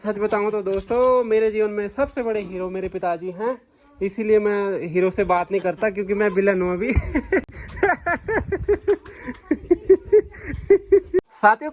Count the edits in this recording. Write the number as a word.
zero